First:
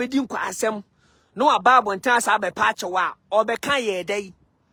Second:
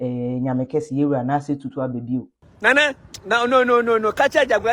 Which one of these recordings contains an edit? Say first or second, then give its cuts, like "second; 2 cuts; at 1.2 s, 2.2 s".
second; 1 cut; at 2.4 s